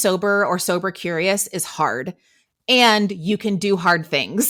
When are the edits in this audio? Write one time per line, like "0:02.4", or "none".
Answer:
none